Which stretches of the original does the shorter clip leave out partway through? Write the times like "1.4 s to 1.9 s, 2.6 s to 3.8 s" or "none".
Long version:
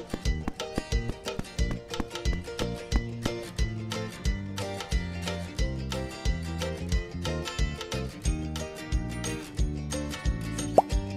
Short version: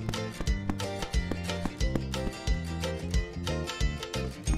none

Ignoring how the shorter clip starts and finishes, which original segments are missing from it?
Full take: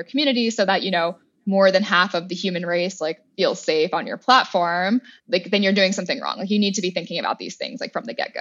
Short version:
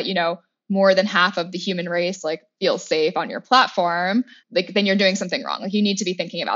none

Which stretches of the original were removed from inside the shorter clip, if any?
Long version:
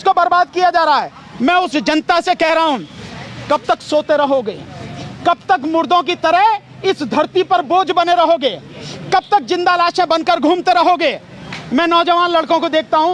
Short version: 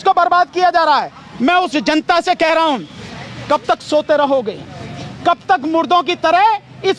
none

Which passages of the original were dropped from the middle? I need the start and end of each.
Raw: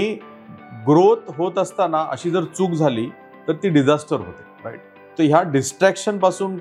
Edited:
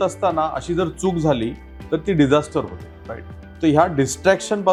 none

